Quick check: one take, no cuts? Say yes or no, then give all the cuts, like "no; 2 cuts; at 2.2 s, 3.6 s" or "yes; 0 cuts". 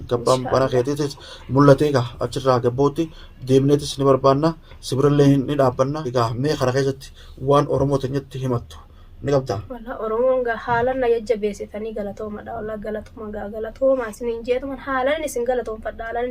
no; 1 cut; at 6.1 s